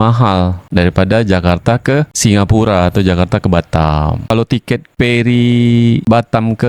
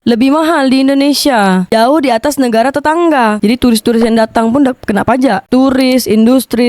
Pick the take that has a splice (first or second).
second